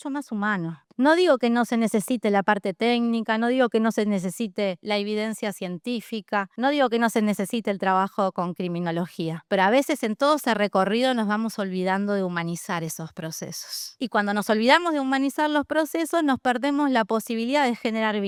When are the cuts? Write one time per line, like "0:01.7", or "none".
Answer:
none